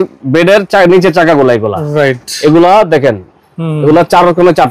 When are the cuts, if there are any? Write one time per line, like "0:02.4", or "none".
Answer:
none